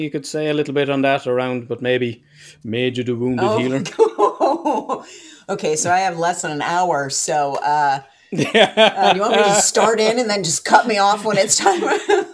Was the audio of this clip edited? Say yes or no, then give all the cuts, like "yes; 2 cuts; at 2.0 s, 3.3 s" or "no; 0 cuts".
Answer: no; 0 cuts